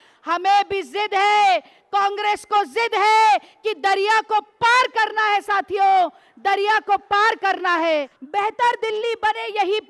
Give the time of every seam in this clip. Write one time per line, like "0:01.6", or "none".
0:08.2